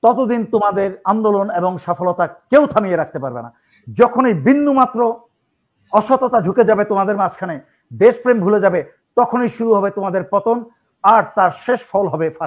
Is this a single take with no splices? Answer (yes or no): yes